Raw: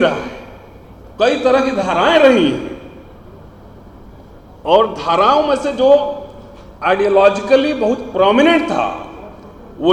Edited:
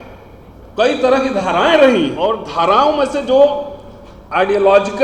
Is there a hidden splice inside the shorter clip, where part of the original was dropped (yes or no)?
yes